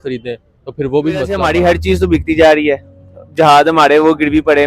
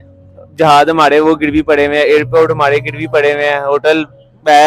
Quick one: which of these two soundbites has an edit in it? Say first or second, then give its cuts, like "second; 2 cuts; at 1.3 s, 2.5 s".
first; 1 cut; at 1.4 s